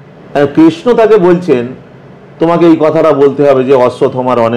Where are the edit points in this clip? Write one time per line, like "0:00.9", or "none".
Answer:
none